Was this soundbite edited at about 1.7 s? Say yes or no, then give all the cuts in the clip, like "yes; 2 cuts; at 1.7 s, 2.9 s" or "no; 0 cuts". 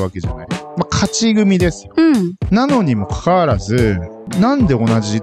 no; 1 cut; at 4.2 s